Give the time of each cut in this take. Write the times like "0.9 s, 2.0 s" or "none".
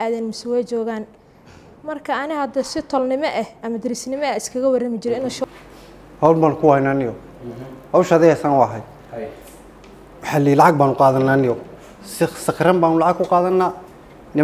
5.4 s